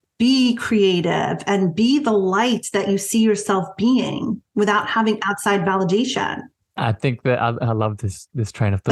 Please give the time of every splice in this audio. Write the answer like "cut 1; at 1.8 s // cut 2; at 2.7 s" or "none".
none